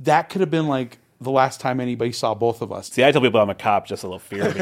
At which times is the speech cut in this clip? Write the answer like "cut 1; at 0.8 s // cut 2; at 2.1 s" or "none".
cut 1; at 2.8 s